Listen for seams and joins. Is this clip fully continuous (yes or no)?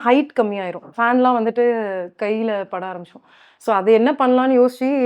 no